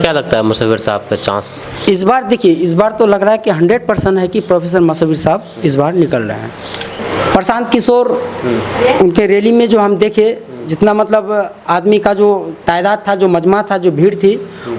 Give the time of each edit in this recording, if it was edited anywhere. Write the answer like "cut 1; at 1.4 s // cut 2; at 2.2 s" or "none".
cut 1; at 7.0 s

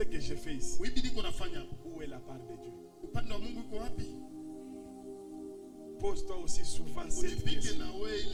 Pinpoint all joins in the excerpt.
none

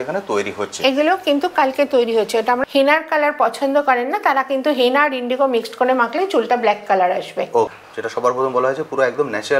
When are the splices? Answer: cut 1; at 2.6 s // cut 2; at 7.7 s

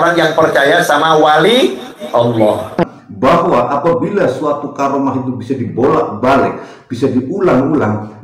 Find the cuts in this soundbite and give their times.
cut 1; at 2.8 s

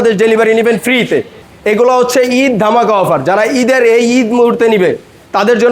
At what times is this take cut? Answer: cut 1; at 1.5 s

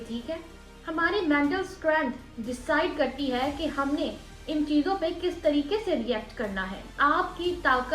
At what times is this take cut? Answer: cut 1; at 6.8 s

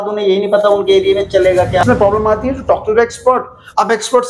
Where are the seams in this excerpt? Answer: cut 1; at 1.8 s

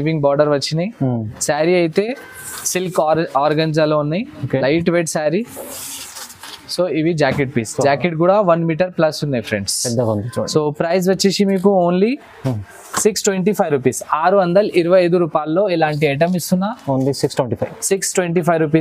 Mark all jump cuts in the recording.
none

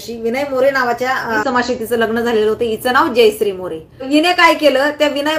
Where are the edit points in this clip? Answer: cut 1; at 1.4 s // cut 2; at 4.0 s

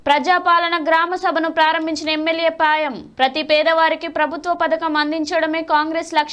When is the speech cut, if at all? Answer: none

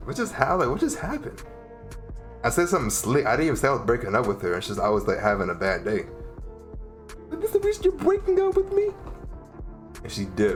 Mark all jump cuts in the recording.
none

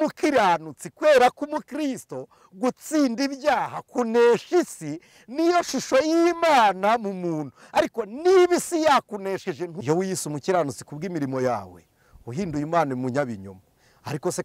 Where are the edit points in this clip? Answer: cut 1; at 9.7 s

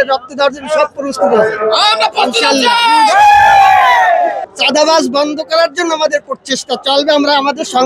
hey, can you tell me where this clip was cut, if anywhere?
cut 1; at 4.4 s

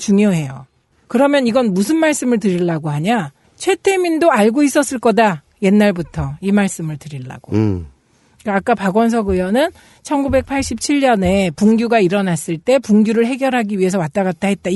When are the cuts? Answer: cut 1; at 11.4 s

